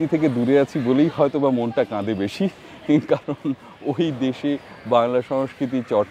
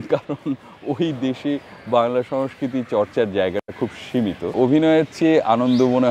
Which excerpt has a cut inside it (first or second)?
second